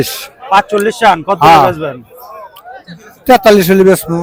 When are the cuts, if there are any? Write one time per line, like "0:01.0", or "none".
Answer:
none